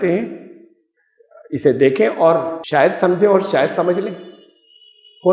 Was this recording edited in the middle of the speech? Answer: no; 0 cuts

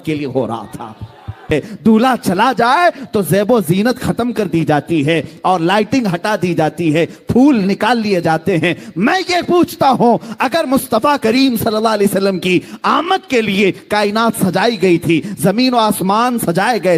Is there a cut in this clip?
yes; 1 cut; at 1.5 s

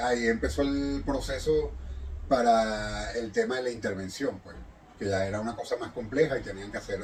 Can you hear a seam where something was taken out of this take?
no; 0 cuts

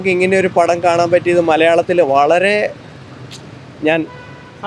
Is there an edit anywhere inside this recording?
no; 0 cuts

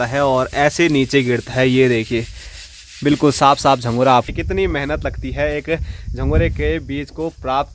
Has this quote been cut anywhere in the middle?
yes; 1 cut; at 4.3 s

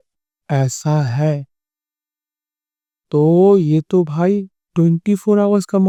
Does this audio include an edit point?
no; 0 cuts

